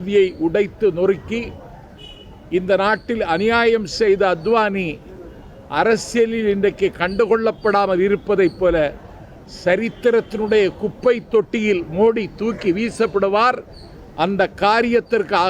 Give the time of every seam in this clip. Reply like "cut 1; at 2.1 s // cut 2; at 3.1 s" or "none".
none

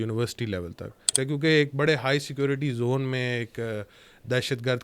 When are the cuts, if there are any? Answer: cut 1; at 1.0 s

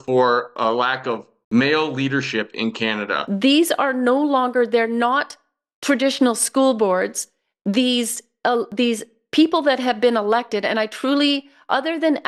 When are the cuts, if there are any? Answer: cut 1; at 1.3 s // cut 2; at 3.2 s

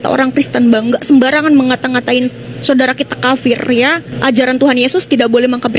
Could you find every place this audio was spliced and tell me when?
cut 1; at 4.1 s

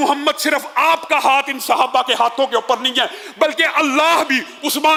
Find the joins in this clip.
none

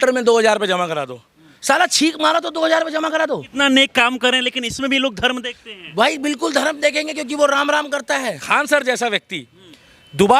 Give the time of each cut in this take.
cut 1; at 3.5 s // cut 2; at 8.4 s

